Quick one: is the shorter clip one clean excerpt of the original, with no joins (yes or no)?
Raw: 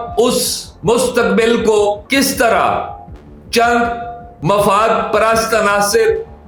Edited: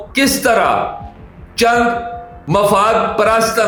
yes